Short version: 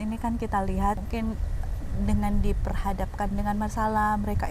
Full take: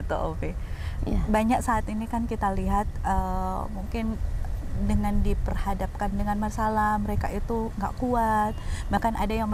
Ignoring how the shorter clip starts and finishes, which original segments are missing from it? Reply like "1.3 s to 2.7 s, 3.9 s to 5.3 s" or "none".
2.9 s to 3.8 s